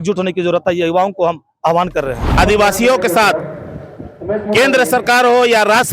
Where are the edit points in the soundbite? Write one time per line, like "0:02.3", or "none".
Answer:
0:02.4